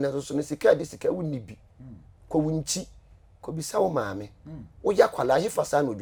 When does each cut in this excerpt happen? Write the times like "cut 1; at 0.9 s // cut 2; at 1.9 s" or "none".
none